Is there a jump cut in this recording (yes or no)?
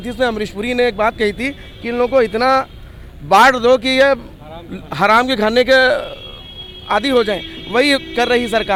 no